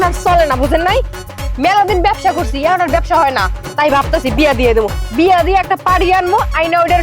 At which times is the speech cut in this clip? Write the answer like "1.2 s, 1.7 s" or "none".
none